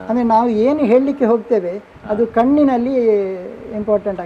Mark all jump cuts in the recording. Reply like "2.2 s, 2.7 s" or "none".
none